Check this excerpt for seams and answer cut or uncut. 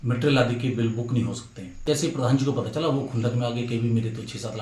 cut